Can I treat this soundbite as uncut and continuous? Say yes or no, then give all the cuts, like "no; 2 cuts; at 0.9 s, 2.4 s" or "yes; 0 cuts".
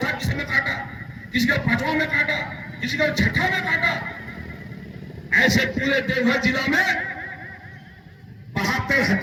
yes; 0 cuts